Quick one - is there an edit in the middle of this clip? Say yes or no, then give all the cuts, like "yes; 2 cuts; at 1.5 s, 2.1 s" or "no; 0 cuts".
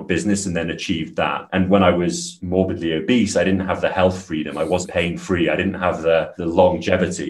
yes; 1 cut; at 4.9 s